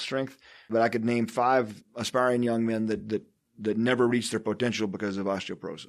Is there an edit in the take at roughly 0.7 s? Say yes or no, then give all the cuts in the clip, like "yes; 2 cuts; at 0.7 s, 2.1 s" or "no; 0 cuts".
yes; 2 cuts; at 0.7 s, 1.8 s